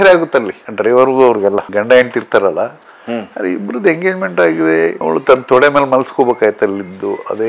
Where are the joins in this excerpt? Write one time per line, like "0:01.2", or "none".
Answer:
0:05.0